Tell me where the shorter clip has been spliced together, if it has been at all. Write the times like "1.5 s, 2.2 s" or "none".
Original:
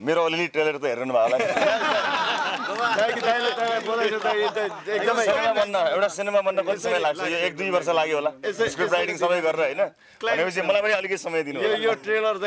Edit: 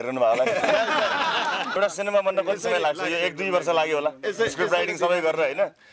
1.7 s